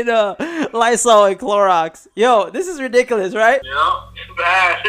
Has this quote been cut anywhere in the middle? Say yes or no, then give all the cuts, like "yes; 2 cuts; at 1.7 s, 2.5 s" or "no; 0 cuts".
yes; 1 cut; at 3.7 s